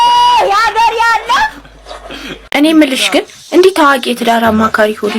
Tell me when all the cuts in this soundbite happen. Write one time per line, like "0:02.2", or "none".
0:02.4